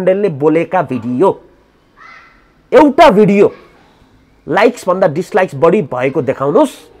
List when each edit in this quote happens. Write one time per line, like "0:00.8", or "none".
none